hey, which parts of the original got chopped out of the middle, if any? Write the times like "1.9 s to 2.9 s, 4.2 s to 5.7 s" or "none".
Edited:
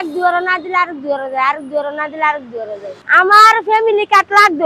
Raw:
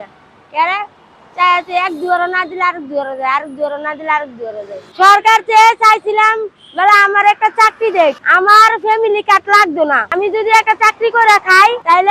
4.9 s to 8.2 s